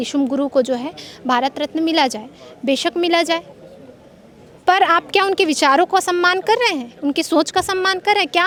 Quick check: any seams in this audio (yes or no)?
no